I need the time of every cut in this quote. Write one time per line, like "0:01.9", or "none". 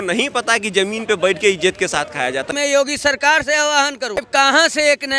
0:02.5
0:04.2